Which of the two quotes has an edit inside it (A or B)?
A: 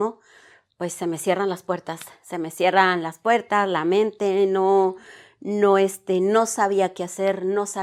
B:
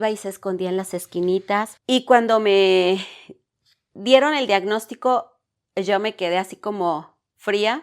B